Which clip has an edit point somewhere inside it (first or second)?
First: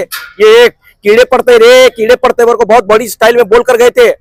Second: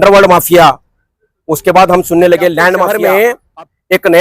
second